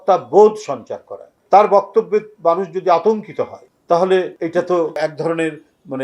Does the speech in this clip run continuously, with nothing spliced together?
no; 1 cut; at 4.8 s

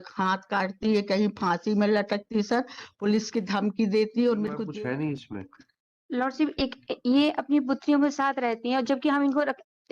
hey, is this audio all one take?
no; 1 cut; at 4.6 s

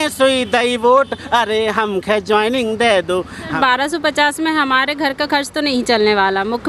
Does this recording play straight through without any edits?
no; 1 cut; at 3.5 s

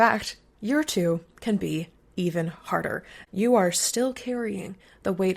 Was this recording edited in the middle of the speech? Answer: yes; 1 cut; at 3.1 s

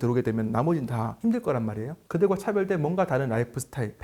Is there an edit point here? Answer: no; 0 cuts

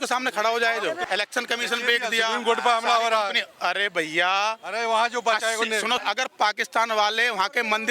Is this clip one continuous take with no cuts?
no; 2 cuts; at 1.0 s, 6.0 s

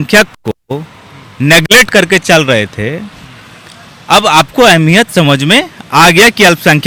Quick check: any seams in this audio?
no; 0 cuts

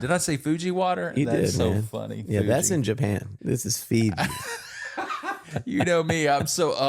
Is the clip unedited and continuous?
no; 2 cuts; at 3.3 s, 5.2 s

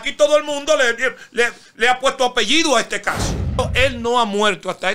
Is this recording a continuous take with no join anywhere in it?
no; 1 cut; at 3.6 s

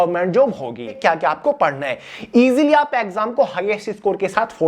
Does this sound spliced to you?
yes; 1 cut; at 1.0 s

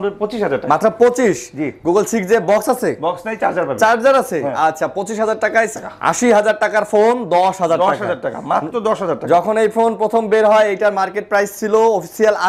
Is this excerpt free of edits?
no; 1 cut; at 5.8 s

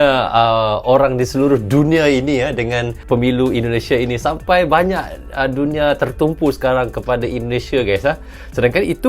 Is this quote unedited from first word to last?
no; 1 cut; at 3.0 s

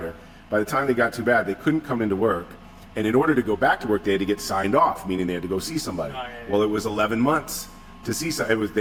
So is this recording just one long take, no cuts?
yes; 0 cuts

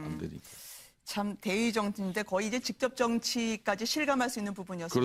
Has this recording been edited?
no; 0 cuts

